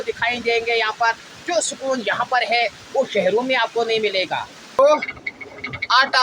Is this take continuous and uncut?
no; 1 cut; at 4.8 s

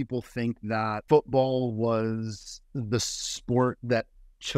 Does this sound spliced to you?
yes; 1 cut; at 1.0 s

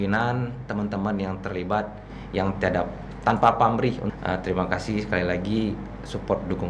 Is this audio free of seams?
no; 1 cut; at 4.1 s

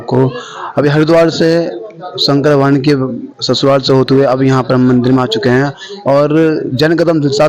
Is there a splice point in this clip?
no; 0 cuts

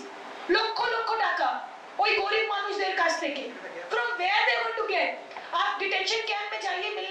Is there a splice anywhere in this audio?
no; 0 cuts

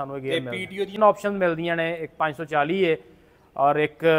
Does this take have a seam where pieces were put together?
yes; 1 cut; at 1.0 s

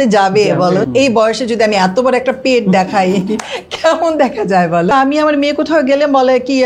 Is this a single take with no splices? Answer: no; 2 cuts; at 0.9 s, 4.9 s

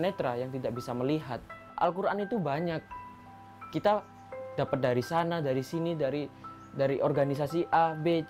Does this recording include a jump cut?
yes; 1 cut; at 1.7 s

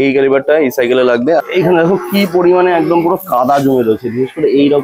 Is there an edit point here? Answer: yes; 1 cut; at 1.4 s

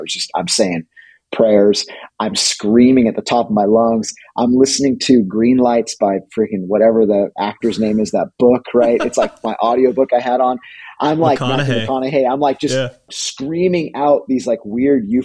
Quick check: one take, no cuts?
no; 1 cut; at 13.1 s

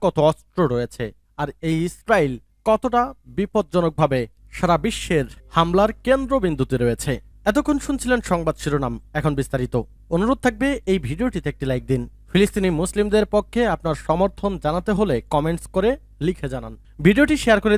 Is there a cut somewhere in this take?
no; 0 cuts

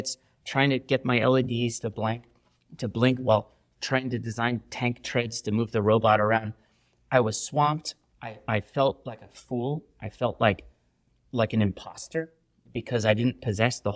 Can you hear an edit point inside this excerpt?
no; 0 cuts

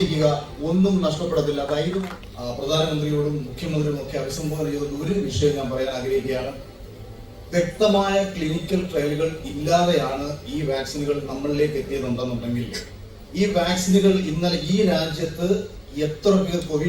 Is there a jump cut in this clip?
yes; 1 cut; at 2.1 s

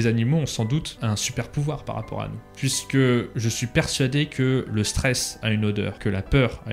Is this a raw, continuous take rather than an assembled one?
no; 4 cuts; at 0.9 s, 2.4 s, 3.3 s, 5.9 s

